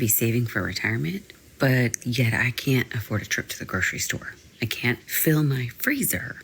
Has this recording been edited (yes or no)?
no